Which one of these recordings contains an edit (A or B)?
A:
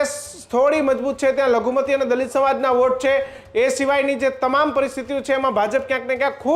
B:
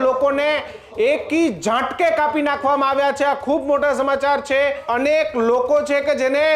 B